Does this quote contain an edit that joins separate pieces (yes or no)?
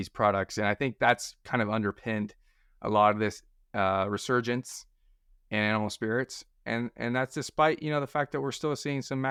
no